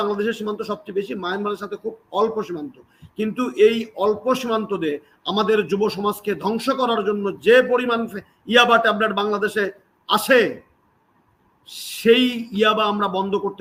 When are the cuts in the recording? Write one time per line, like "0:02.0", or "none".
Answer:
none